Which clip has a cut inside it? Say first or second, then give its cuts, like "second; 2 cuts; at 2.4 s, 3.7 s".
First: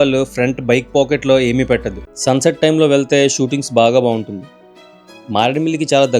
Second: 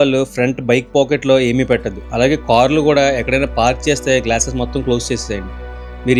first; 1 cut; at 2.1 s